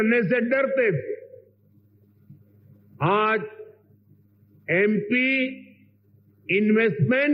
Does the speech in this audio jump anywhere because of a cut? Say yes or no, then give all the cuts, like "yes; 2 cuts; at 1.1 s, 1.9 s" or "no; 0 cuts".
no; 0 cuts